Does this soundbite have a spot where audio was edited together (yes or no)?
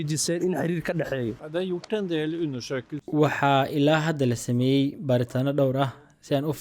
yes